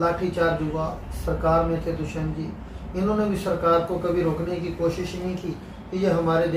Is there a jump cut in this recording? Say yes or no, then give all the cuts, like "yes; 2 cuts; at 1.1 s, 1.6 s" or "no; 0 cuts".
no; 0 cuts